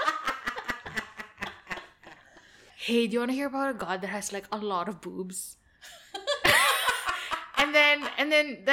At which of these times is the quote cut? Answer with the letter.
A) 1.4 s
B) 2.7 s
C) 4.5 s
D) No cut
B